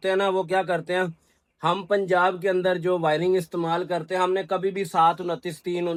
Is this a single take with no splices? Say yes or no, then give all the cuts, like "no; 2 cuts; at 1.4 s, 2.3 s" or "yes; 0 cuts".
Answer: yes; 0 cuts